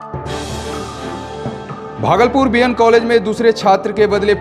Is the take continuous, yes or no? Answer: no